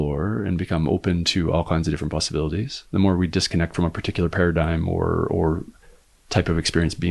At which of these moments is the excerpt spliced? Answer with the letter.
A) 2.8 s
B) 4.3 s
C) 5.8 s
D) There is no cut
D